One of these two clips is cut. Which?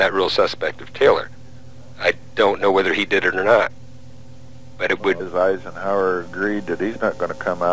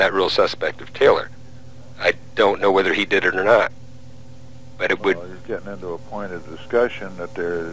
second; 1 cut; at 5.3 s

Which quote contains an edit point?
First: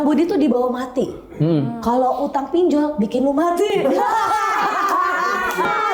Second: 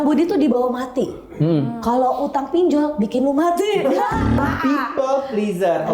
second; 1 cut; at 4.4 s

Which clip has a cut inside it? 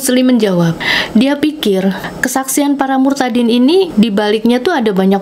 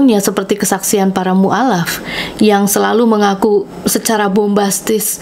first; 3 cuts; at 0.9 s, 2.1 s, 3.9 s

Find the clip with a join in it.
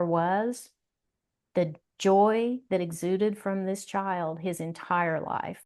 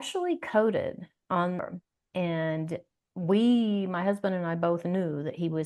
second; 1 cut; at 1.6 s

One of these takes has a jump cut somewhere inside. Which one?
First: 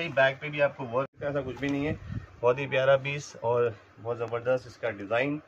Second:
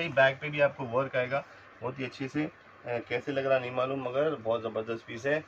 first; 1 cut; at 1.1 s

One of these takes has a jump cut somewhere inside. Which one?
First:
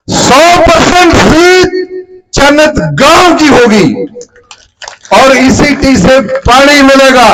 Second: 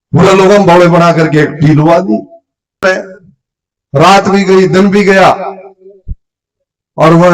second; 1 cut; at 2.8 s

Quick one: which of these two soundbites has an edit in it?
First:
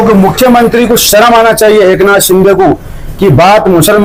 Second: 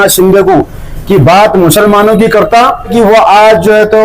second; 1 cut; at 2.9 s

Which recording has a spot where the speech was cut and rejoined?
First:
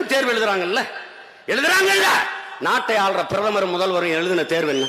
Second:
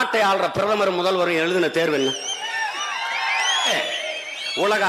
second; 1 cut; at 3.7 s

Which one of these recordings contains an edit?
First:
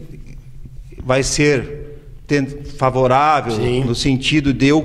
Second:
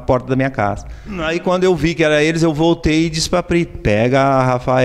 second; 1 cut; at 1.2 s

